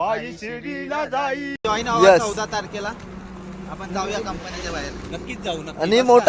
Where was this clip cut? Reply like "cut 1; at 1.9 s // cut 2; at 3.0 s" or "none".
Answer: cut 1; at 1.6 s